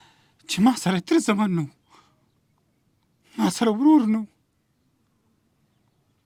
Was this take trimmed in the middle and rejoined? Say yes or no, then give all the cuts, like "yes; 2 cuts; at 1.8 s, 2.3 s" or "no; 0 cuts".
no; 0 cuts